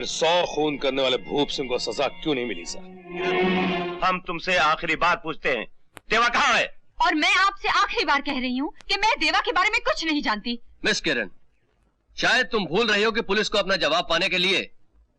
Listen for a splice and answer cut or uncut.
cut